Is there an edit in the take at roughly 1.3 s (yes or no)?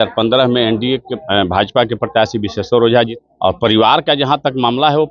no